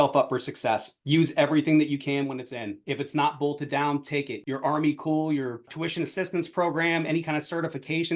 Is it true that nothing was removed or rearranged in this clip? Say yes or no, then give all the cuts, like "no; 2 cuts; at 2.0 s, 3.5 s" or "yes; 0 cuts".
no; 2 cuts; at 4.4 s, 5.7 s